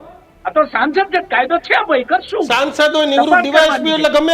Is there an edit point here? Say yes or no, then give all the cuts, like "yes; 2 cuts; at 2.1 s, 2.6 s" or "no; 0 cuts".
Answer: no; 0 cuts